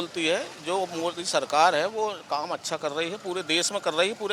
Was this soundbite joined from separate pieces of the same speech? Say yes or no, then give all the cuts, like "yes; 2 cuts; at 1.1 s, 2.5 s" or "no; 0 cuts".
no; 0 cuts